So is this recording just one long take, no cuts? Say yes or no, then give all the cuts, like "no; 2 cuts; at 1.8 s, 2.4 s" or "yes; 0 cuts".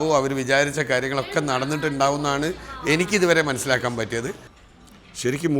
no; 1 cut; at 4.5 s